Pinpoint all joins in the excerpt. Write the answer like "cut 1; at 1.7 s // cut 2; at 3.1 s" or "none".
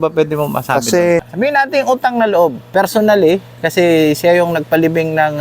cut 1; at 1.3 s